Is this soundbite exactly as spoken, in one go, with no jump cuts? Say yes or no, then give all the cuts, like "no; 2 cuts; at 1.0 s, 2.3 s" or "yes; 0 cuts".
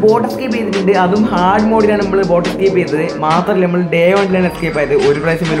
yes; 0 cuts